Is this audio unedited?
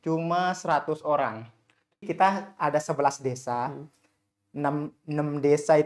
no; 1 cut; at 2.1 s

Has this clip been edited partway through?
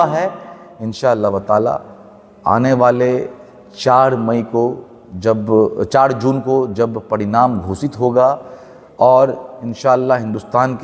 no; 0 cuts

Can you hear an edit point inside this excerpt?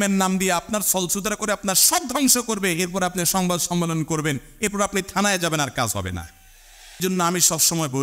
yes; 1 cut; at 7.0 s

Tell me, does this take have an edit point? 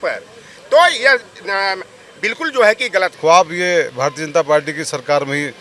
yes; 1 cut; at 3.1 s

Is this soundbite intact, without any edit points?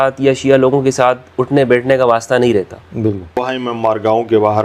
no; 1 cut; at 3.3 s

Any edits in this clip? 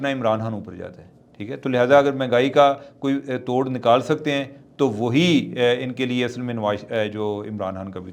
no; 0 cuts

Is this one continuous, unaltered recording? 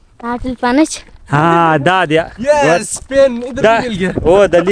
yes; 0 cuts

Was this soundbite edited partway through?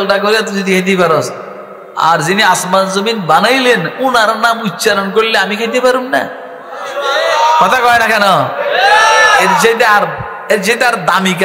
no; 0 cuts

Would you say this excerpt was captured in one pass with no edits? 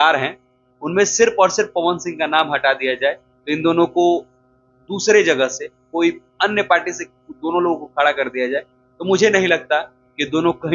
yes; 0 cuts

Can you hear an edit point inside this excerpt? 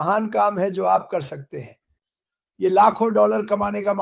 no; 0 cuts

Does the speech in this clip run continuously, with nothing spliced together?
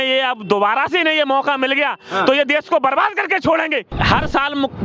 no; 1 cut; at 3.8 s

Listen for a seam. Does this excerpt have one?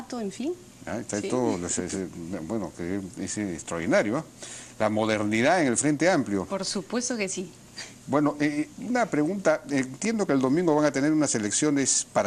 yes; 1 cut; at 8.7 s

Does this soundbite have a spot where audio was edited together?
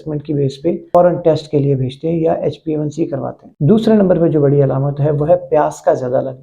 no; 0 cuts

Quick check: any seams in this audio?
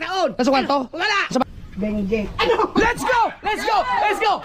yes; 1 cut; at 1.4 s

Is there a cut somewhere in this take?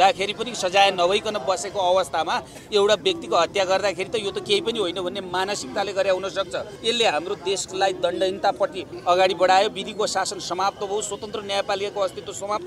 no; 0 cuts

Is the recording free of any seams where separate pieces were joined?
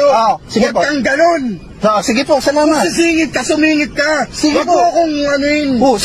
no; 1 cut; at 4.5 s

